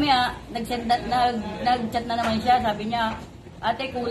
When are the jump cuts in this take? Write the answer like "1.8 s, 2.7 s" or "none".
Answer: none